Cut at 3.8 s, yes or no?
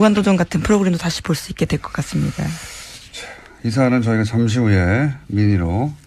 no